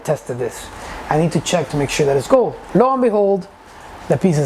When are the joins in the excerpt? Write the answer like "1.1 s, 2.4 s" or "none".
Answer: 2.6 s